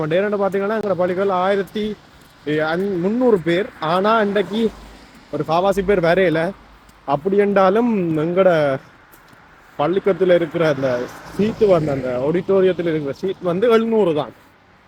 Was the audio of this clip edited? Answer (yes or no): no